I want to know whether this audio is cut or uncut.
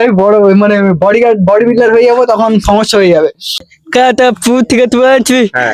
cut